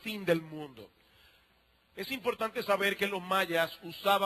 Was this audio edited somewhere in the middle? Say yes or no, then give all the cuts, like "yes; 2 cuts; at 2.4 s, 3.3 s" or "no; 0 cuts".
yes; 1 cut; at 2.8 s